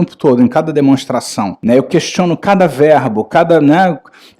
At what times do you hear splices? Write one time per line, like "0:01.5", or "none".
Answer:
0:01.5